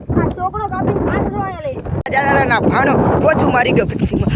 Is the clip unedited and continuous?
no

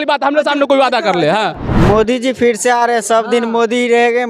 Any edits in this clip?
yes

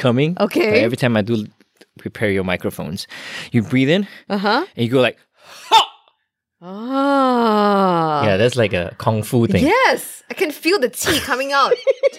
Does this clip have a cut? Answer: no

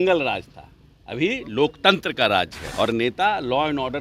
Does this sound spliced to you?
yes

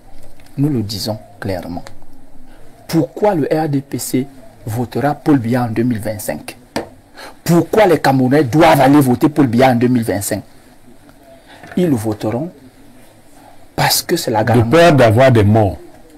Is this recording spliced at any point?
no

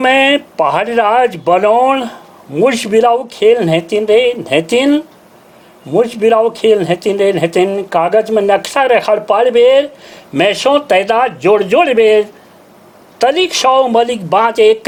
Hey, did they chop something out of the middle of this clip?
no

